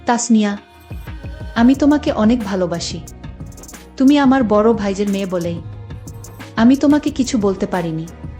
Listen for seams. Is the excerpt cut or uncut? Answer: uncut